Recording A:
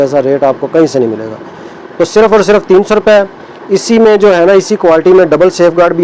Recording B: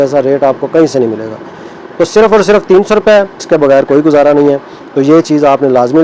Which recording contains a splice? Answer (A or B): B